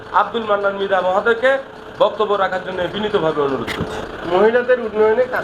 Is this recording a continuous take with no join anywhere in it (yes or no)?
no